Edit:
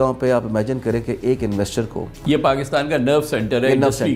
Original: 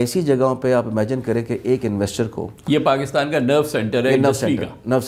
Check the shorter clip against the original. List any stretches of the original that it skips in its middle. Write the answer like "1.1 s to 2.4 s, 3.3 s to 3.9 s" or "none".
none